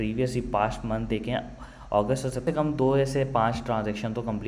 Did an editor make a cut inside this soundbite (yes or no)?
yes